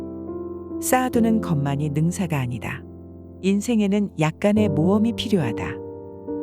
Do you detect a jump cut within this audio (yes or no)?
yes